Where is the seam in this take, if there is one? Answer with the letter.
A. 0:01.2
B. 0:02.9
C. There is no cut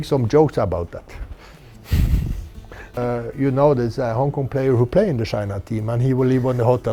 C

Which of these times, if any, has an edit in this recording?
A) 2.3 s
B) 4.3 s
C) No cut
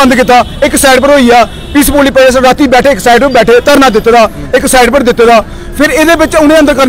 C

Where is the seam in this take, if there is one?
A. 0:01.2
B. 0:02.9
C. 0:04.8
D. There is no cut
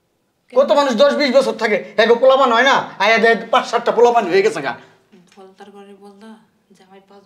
D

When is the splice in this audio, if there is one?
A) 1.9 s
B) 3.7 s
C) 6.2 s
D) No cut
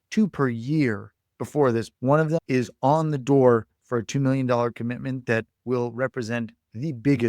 A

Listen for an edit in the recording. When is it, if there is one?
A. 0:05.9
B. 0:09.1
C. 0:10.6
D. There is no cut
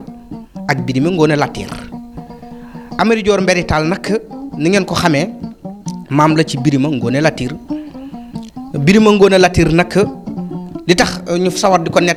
D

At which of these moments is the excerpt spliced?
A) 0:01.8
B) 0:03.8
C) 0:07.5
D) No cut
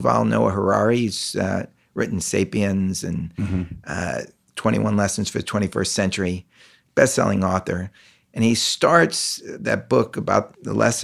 D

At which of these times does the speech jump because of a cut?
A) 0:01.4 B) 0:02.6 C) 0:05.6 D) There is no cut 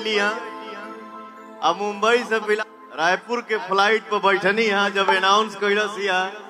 B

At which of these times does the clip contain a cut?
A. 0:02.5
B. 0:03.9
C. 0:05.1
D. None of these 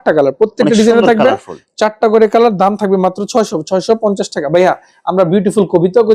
D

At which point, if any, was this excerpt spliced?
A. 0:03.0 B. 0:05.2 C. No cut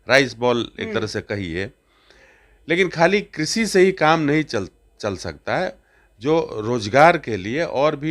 C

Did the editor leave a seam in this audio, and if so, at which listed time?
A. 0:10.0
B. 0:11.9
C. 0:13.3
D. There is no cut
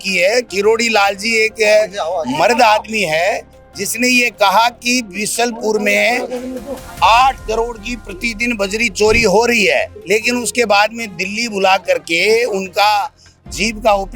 A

